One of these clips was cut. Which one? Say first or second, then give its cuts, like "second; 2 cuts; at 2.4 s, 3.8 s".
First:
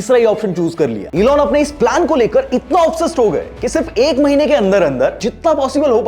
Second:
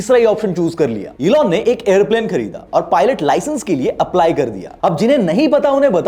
first; 2 cuts; at 1.0 s, 5.2 s